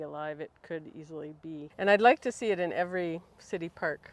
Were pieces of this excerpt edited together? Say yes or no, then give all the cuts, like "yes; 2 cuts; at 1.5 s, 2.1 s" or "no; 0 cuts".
yes; 1 cut; at 1.7 s